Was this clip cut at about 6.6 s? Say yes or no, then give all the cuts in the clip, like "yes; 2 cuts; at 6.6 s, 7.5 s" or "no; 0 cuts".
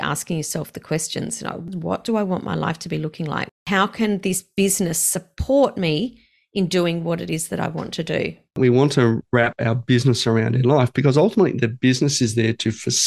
no; 1 cut; at 8.6 s